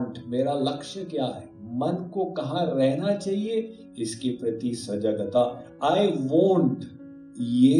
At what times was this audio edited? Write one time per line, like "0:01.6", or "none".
0:05.7